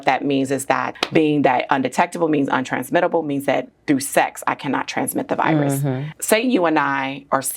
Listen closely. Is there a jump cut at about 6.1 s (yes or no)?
yes